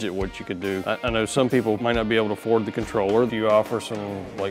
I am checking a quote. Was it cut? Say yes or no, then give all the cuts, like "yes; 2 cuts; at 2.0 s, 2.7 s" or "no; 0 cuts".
yes; 3 cuts; at 0.8 s, 1.8 s, 3.3 s